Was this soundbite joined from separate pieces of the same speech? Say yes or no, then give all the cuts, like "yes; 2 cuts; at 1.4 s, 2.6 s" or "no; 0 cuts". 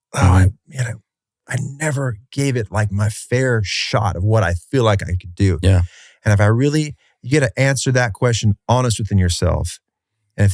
no; 0 cuts